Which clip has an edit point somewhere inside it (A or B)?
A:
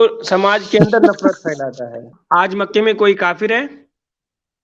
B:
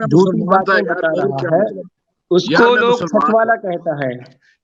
A